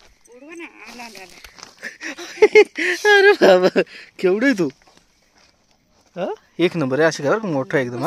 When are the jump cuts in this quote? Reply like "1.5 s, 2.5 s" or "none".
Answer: none